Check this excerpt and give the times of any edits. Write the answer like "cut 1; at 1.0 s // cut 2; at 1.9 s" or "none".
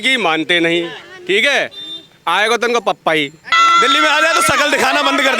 cut 1; at 3.5 s